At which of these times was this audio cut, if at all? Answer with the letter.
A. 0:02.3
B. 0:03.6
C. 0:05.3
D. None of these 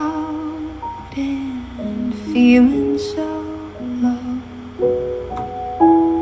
D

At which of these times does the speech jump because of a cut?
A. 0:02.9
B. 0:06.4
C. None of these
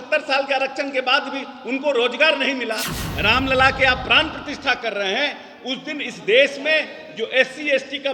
A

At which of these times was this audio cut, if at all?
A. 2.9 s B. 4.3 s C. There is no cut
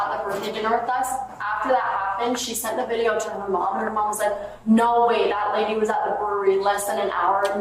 C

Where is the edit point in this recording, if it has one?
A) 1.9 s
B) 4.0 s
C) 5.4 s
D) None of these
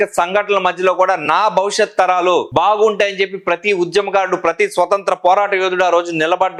D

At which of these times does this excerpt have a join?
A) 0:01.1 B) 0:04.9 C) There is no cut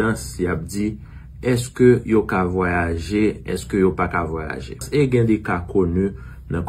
B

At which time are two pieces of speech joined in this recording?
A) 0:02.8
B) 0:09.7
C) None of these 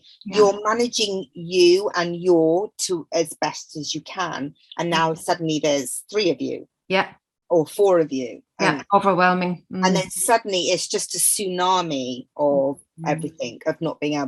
C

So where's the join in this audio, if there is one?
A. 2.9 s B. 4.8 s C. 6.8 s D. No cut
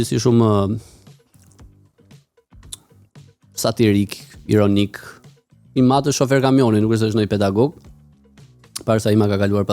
D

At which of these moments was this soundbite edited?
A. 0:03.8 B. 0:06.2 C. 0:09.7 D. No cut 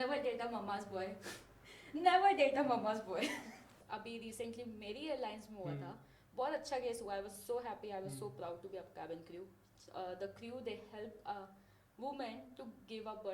A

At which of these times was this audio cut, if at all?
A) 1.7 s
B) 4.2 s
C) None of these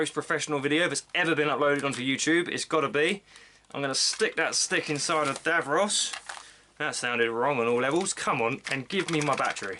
C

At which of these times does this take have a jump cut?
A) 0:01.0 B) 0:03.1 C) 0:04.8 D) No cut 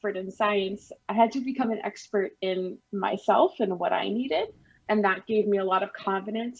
C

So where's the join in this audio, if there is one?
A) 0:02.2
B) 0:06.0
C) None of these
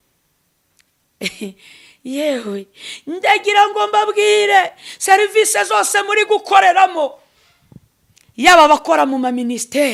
C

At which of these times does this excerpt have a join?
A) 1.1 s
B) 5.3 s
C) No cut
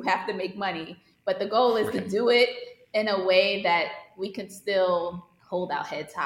B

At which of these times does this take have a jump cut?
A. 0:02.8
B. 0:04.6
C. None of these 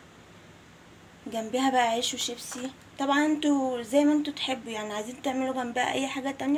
C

